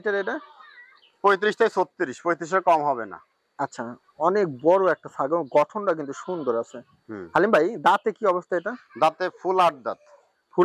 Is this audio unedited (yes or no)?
yes